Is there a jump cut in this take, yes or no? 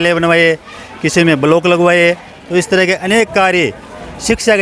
no